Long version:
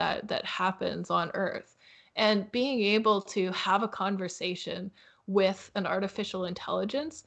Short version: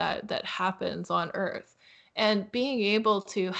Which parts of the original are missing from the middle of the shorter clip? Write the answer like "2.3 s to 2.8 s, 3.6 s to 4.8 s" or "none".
none